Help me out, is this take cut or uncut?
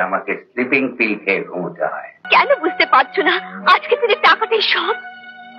cut